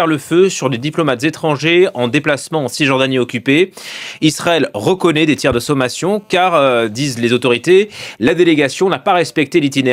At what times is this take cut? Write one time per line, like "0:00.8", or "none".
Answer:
none